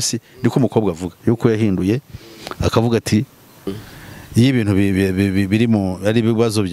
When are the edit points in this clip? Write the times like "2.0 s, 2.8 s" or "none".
3.8 s

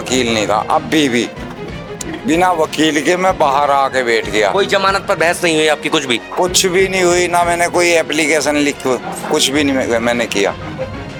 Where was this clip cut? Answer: none

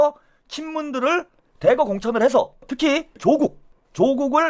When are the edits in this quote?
3.2 s

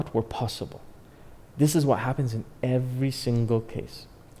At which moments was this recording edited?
none

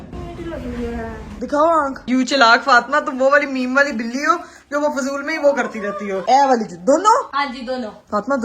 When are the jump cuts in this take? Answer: 2.0 s, 6.2 s, 7.3 s

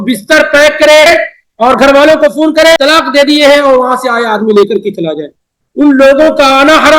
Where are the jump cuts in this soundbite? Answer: 1.1 s, 2.8 s

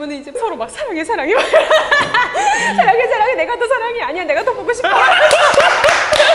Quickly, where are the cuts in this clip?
none

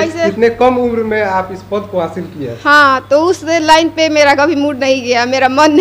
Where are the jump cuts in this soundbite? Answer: none

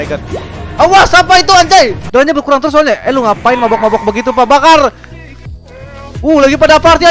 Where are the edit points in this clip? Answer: 2.0 s

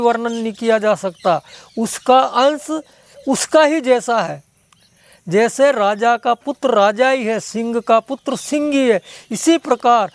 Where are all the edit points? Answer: none

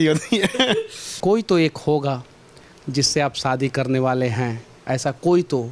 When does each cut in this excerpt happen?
1.0 s

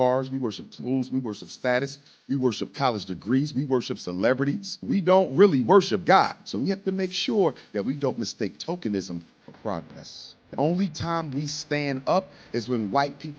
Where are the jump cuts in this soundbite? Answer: 6.3 s, 10.5 s

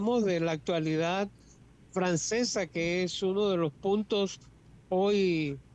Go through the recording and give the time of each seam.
none

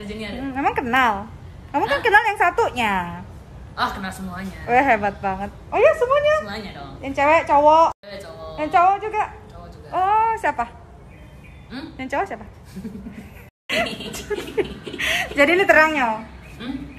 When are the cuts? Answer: none

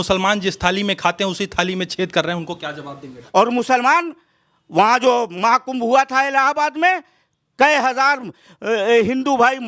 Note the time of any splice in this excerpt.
3.2 s

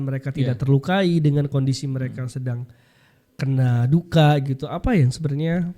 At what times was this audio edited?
none

